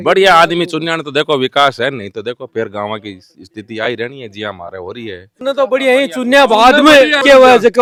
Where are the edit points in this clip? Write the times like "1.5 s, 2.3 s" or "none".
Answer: none